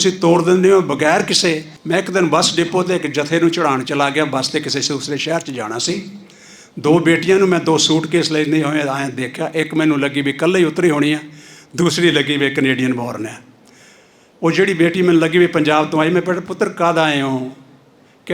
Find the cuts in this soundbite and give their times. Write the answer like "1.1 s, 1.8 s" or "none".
1.7 s